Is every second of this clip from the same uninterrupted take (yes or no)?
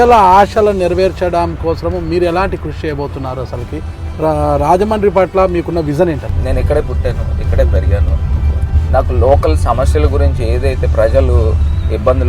no